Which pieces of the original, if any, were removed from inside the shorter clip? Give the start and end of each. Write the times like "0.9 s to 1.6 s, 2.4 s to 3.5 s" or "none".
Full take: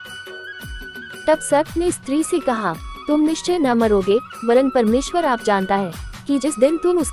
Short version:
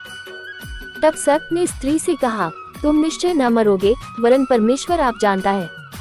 1.0 s to 1.3 s